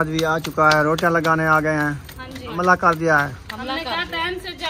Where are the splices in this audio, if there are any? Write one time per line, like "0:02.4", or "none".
0:02.6